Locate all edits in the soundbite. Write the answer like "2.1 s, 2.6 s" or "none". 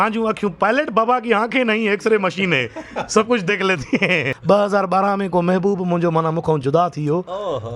4.3 s

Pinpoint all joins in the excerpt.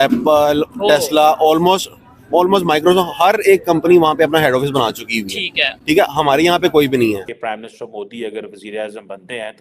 7.3 s

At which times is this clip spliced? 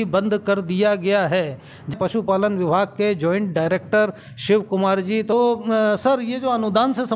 1.9 s, 5.3 s

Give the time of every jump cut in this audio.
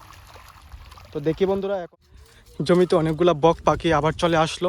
1.8 s

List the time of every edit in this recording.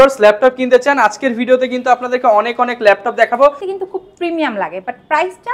3.7 s

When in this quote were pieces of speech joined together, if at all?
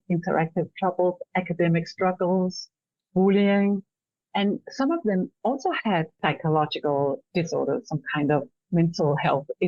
6.2 s

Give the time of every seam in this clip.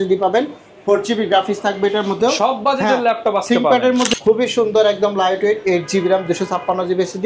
4.1 s

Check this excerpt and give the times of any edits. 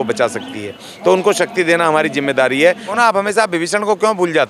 2.9 s

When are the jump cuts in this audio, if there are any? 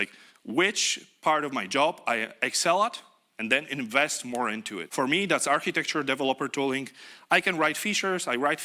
4.8 s

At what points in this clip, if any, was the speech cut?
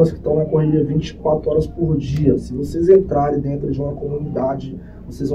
none

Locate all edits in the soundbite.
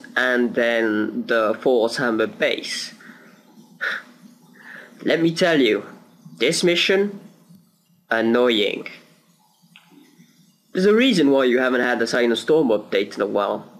2.1 s

